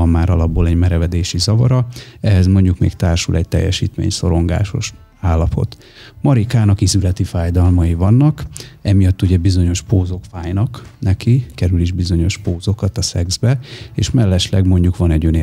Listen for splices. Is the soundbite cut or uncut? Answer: uncut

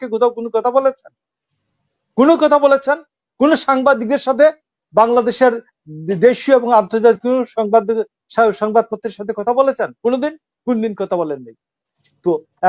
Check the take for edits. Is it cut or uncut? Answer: uncut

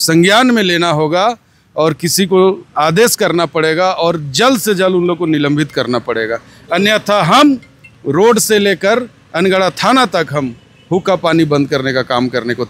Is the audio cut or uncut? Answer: uncut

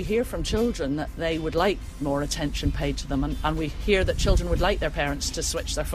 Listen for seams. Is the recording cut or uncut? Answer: uncut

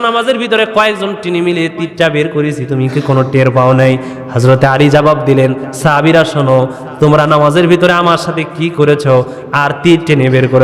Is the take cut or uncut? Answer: uncut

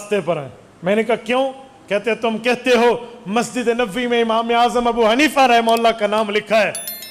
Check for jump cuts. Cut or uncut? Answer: uncut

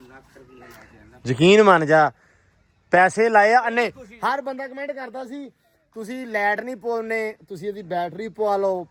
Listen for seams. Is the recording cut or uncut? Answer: uncut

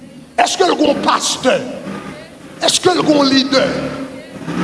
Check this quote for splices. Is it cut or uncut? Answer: uncut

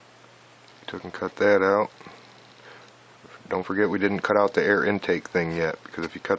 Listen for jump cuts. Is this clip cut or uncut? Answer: uncut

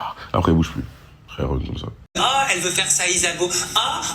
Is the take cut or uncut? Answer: cut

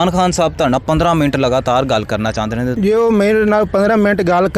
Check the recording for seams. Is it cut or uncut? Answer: cut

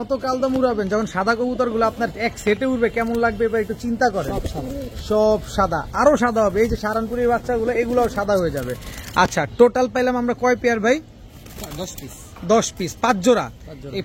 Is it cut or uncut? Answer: uncut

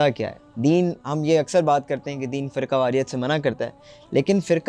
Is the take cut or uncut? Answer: uncut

